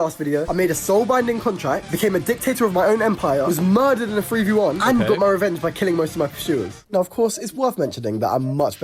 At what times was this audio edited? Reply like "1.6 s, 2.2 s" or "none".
4.6 s, 7.8 s